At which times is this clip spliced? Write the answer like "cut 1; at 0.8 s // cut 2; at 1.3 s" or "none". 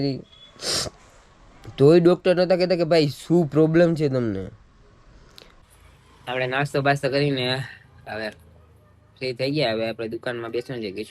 cut 1; at 5.5 s